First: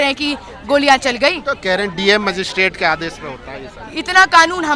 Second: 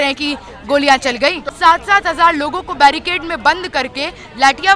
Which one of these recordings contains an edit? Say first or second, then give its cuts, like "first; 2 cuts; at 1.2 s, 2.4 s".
second; 1 cut; at 1.5 s